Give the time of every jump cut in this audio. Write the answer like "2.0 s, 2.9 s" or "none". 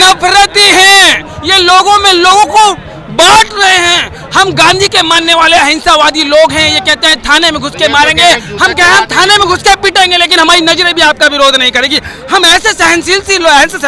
none

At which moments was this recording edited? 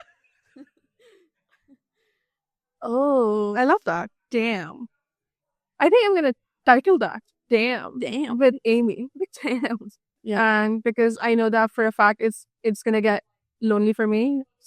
10.1 s

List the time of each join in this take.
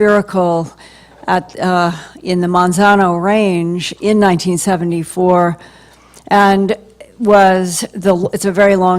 7.4 s

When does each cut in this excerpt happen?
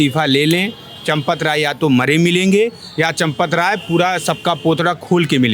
none

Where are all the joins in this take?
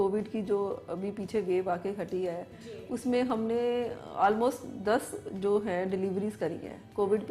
none

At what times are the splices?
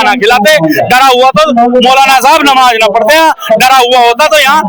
none

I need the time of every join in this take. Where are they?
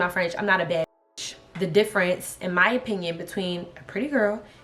1.4 s

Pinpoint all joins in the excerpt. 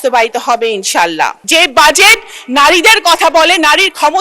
1.4 s

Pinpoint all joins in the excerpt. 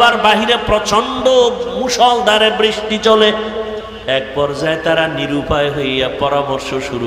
3.9 s

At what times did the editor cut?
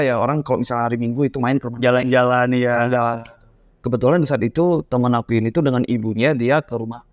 none

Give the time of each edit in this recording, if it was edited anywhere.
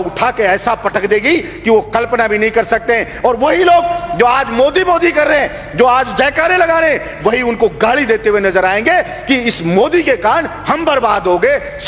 none

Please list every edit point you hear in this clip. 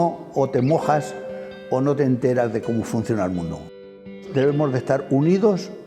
4.2 s

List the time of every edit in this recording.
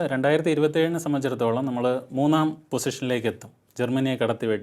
none

